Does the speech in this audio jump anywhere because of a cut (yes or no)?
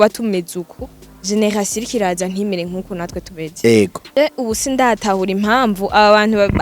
yes